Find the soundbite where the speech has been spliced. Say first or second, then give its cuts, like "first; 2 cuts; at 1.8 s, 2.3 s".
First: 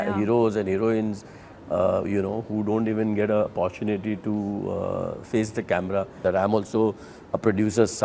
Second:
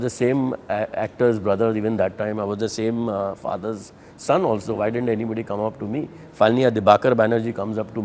first; 1 cut; at 6.1 s